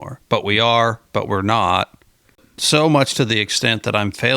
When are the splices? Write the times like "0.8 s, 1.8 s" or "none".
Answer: 2.5 s